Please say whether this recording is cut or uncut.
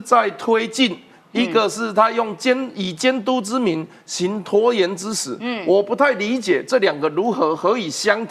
uncut